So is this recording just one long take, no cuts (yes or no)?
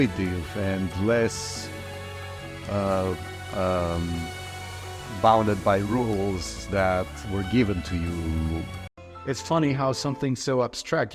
no